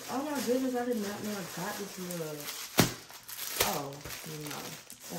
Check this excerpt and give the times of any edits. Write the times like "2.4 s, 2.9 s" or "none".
none